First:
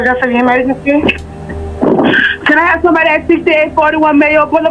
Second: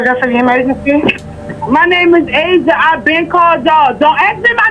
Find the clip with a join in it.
second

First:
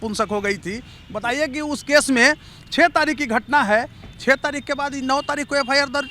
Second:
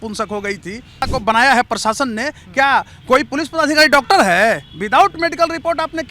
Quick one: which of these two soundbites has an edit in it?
second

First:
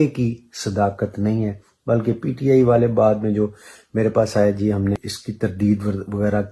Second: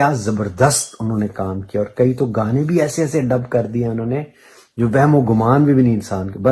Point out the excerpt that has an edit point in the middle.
first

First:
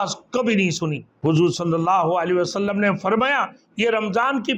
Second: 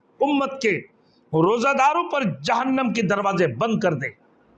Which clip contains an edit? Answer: first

